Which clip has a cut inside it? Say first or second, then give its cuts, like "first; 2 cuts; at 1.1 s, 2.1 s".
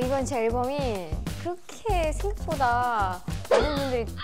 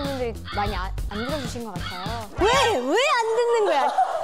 second; 1 cut; at 2.3 s